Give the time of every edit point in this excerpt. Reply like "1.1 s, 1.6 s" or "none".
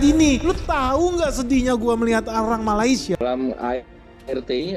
3.2 s